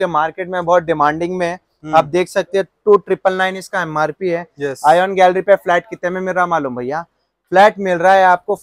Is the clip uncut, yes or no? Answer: yes